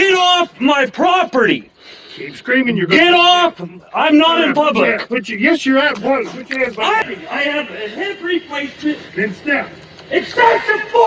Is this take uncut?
no; 1 cut; at 7.0 s

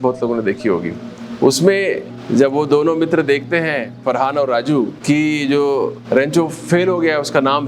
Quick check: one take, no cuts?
no; 4 cuts; at 2.1 s, 3.9 s, 5.0 s, 6.0 s

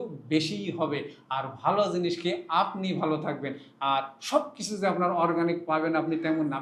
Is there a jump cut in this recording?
no; 0 cuts

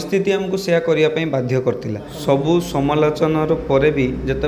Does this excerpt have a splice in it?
yes; 1 cut; at 2.1 s

